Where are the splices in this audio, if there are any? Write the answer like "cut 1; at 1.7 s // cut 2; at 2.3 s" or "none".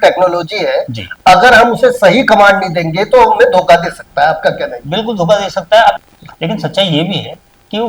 cut 1; at 6.0 s

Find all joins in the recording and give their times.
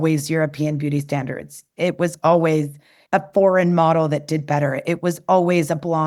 none

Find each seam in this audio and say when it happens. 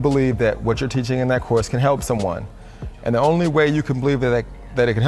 none

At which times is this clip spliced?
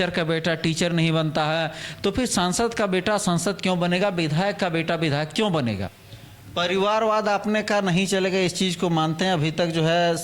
cut 1; at 5.9 s

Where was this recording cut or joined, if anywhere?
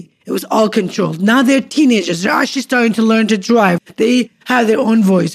cut 1; at 3.8 s

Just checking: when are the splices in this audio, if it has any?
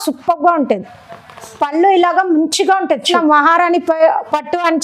cut 1; at 3.1 s

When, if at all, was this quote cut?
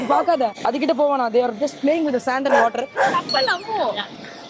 none

